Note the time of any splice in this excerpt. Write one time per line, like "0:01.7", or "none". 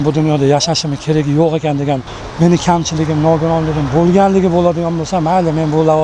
0:02.2